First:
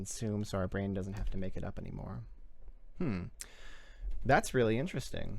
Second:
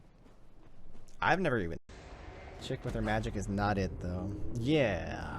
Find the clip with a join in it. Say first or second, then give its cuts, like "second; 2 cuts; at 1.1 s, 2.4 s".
second; 1 cut; at 1.8 s